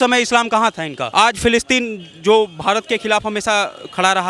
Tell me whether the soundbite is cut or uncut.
cut